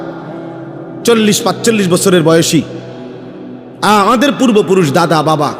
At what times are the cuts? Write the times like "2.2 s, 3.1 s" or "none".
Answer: none